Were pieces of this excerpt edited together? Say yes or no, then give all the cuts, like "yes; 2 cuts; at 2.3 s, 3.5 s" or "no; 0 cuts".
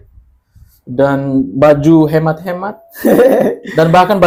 no; 0 cuts